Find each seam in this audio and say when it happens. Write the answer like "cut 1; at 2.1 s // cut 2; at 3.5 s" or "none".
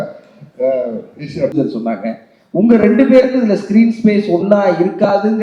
cut 1; at 1.5 s